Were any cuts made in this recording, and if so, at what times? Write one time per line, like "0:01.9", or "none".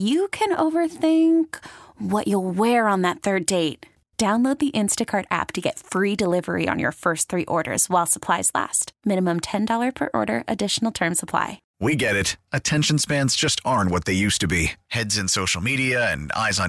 0:11.6